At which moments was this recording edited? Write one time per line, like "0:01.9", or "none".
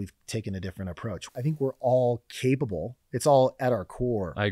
0:01.2